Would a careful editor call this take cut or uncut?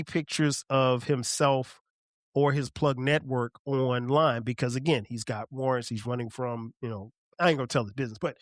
cut